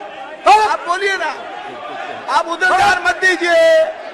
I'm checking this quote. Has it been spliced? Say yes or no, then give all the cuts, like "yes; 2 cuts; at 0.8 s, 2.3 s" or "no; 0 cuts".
no; 0 cuts